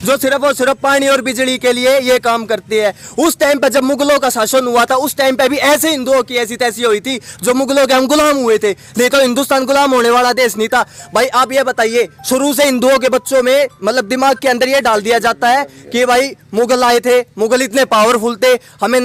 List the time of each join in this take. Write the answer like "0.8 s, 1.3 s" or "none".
none